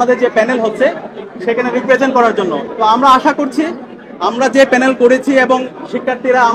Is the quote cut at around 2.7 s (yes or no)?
yes